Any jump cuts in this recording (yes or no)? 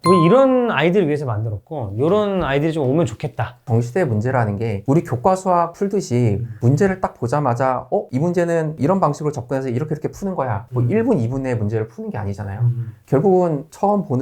yes